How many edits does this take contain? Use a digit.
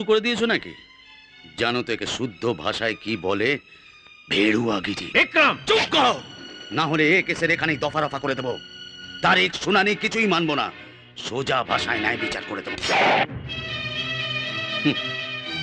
0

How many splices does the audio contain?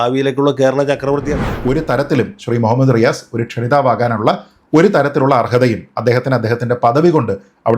1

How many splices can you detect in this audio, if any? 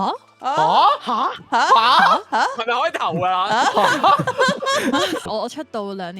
1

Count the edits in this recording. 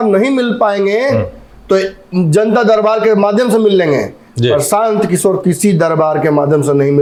0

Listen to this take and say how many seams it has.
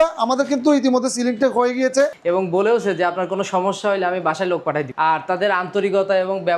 2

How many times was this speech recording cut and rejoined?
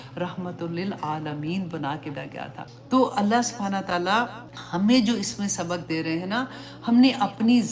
0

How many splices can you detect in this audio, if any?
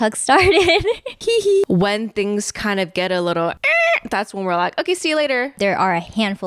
3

